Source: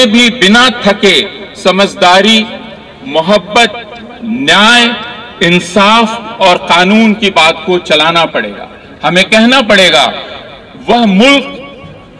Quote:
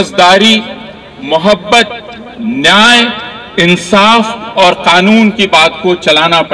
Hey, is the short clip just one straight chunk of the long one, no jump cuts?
yes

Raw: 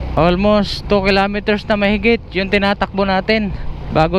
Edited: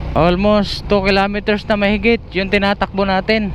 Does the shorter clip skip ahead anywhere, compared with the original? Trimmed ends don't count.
no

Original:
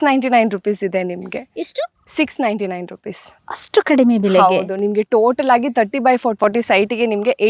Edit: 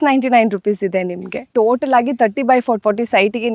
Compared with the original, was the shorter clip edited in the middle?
yes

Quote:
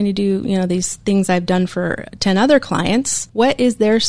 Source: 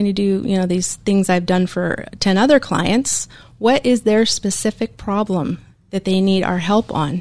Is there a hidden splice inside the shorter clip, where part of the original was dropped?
yes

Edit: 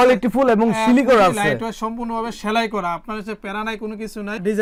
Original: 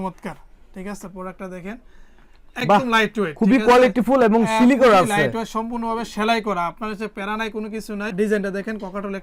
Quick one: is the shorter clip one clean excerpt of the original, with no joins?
yes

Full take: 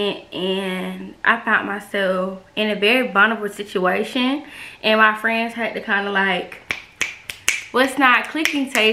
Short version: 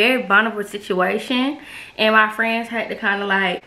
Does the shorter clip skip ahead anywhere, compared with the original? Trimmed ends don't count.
no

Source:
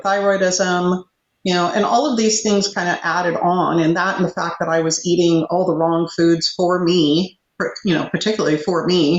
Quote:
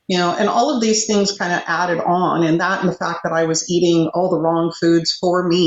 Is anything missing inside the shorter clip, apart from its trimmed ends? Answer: no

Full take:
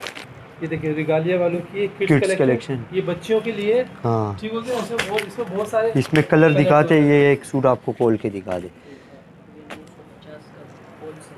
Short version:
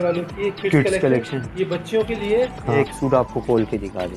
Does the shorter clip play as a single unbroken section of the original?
no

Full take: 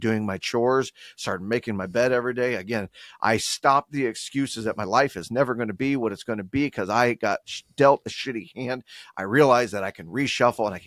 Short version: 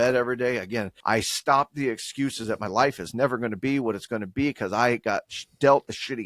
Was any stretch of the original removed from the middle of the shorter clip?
yes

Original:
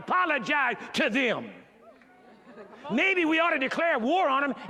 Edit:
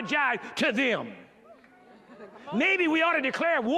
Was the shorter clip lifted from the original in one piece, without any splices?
yes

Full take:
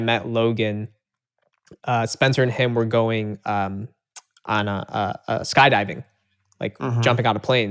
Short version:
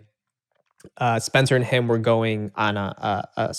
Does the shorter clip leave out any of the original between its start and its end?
yes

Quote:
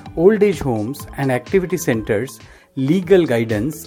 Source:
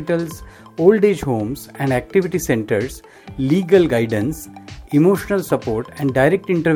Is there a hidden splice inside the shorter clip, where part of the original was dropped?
no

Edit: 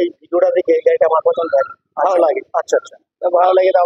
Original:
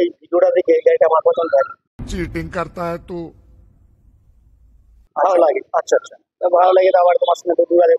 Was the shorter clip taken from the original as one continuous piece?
no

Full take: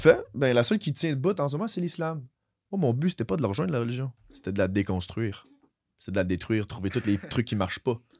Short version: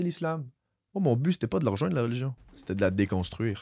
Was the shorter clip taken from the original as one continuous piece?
yes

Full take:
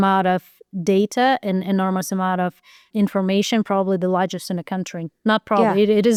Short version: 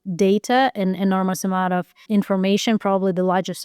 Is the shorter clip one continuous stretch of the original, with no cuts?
no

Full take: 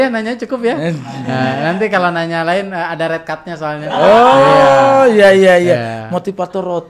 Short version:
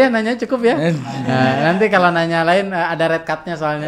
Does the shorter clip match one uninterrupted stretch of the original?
yes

